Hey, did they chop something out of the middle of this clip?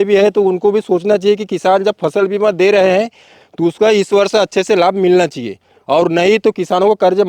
no; 0 cuts

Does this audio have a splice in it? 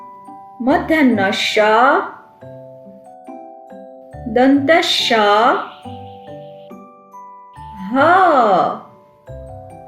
yes; 3 cuts; at 6.0 s, 7.7 s, 9.0 s

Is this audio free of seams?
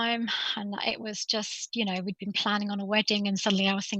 yes; 0 cuts

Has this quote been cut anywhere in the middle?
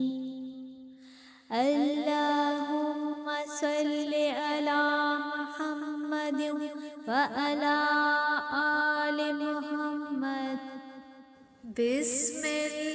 yes; 1 cut; at 10.7 s

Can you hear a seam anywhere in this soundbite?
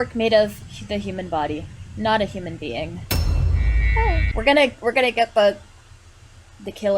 yes; 1 cut; at 4.3 s

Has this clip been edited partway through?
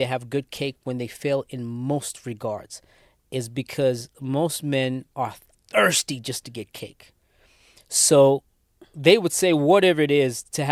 no; 0 cuts

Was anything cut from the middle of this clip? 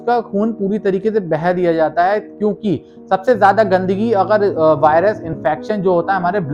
no; 0 cuts

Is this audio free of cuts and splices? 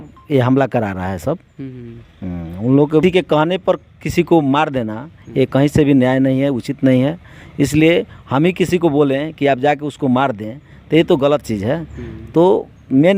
no; 1 cut; at 3.0 s

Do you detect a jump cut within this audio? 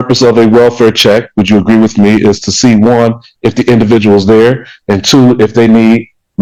no; 0 cuts

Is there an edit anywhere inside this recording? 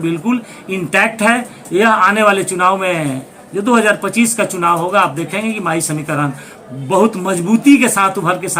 no; 0 cuts

